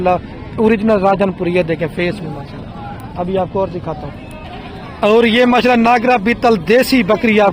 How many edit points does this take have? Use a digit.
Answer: 0